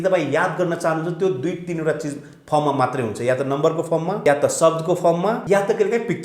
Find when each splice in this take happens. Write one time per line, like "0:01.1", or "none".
0:04.2
0:05.4